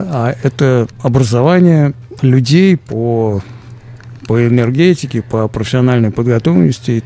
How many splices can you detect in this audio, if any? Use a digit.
2